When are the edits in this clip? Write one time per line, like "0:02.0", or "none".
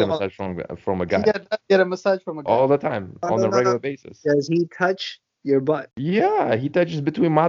0:05.9